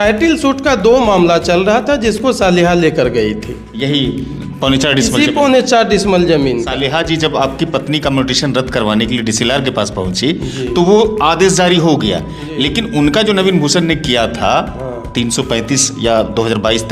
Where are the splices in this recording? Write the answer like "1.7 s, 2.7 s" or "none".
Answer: 6.7 s